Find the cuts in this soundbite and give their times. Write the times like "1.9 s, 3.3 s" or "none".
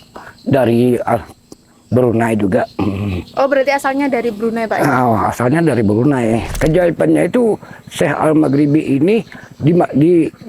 6.5 s